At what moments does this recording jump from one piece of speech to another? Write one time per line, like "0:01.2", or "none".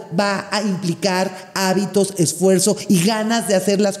none